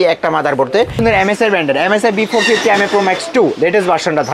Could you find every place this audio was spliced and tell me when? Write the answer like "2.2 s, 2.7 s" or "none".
1.0 s